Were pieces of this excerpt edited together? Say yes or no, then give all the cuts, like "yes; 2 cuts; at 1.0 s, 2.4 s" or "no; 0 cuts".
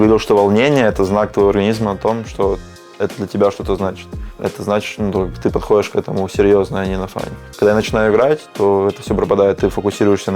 no; 0 cuts